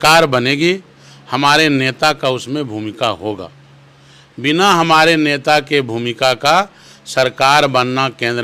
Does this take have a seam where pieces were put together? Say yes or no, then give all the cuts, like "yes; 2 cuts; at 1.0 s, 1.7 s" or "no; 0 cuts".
no; 0 cuts